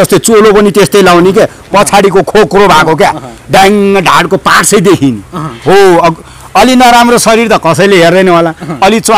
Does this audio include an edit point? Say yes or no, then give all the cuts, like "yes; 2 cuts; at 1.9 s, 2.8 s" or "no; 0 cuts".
no; 0 cuts